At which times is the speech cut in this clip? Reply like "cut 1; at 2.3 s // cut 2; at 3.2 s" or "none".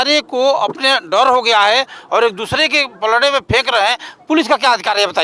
none